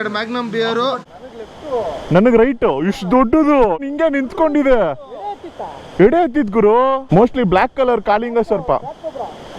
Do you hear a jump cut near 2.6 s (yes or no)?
no